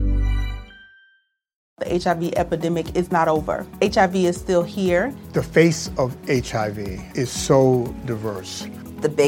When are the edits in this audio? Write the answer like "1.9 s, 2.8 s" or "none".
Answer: 1.7 s